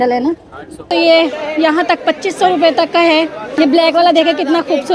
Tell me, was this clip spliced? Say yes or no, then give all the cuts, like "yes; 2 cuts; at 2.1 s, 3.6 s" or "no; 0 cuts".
yes; 2 cuts; at 0.9 s, 3.5 s